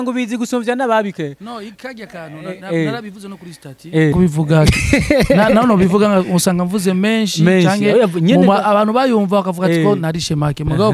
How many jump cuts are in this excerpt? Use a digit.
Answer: 1